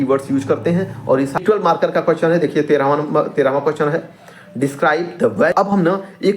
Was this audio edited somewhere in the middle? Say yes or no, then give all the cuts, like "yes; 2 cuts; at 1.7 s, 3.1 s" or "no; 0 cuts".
yes; 2 cuts; at 1.4 s, 5.5 s